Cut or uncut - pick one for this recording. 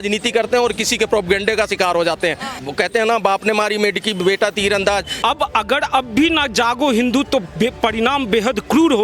cut